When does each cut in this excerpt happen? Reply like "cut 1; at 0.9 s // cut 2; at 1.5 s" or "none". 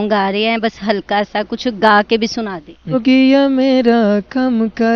cut 1; at 3.0 s